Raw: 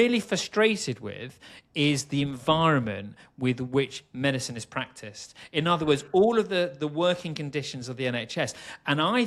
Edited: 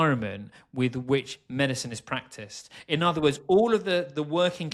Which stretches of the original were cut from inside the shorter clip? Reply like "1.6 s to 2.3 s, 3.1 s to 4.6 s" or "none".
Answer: none